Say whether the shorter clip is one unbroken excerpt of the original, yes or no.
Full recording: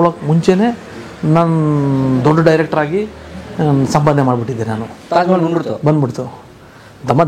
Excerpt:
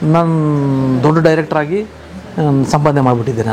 yes